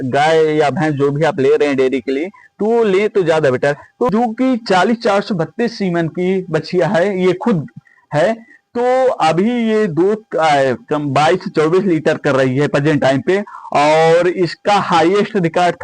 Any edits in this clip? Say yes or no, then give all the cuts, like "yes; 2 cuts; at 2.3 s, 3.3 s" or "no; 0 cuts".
yes; 1 cut; at 4.1 s